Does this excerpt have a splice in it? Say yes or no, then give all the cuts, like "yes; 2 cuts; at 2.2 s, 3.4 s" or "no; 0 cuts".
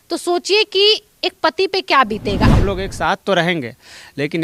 yes; 1 cut; at 2.5 s